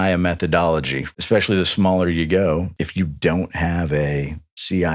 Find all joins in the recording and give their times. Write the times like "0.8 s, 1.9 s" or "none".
1.0 s, 2.7 s